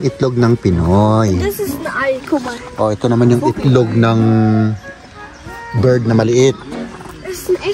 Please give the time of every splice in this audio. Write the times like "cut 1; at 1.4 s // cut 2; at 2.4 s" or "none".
none